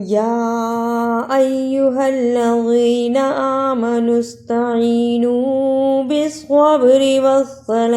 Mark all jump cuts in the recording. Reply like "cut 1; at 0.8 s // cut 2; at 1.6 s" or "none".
none